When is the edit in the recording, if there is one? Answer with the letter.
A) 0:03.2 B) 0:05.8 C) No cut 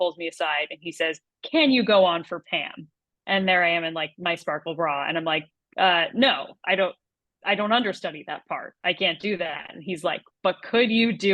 C